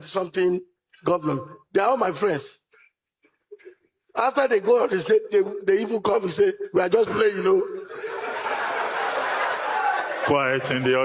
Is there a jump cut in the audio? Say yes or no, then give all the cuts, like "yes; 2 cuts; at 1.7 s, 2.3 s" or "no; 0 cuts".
no; 0 cuts